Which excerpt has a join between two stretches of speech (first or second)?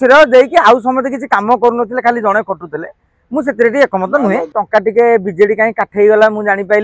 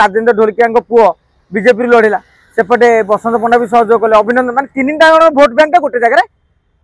first